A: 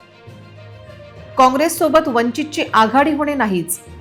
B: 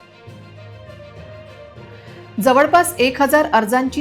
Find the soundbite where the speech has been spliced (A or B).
B